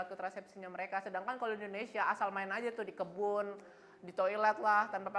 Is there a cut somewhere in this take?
no; 0 cuts

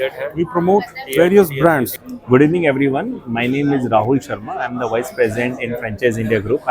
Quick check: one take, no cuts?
no; 1 cut; at 2.1 s

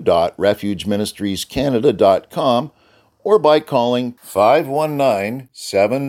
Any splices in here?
no; 0 cuts

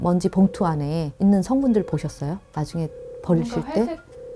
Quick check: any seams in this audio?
yes; 1 cut; at 1.0 s

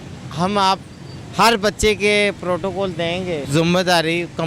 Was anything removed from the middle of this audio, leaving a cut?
yes; 1 cut; at 3.4 s

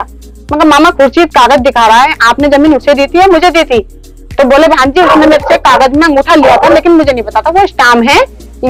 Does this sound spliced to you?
no; 0 cuts

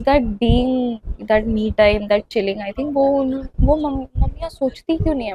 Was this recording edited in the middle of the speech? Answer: no; 0 cuts

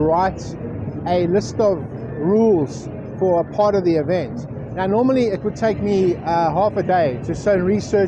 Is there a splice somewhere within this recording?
no; 0 cuts

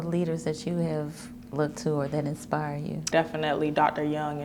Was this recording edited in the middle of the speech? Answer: yes; 1 cut; at 3.1 s

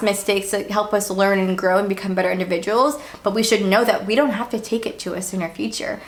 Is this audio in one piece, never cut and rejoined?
yes; 0 cuts

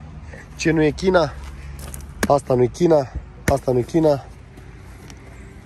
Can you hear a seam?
no; 0 cuts

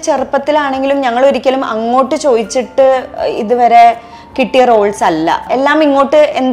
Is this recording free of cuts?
no; 1 cut; at 5.5 s

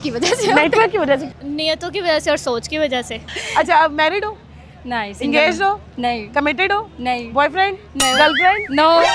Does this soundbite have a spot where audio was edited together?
yes; 2 cuts; at 1.3 s, 3.3 s

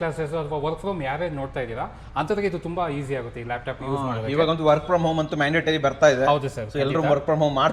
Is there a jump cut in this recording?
no; 0 cuts

